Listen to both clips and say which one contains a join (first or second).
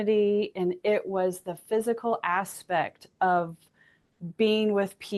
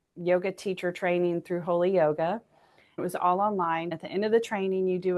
second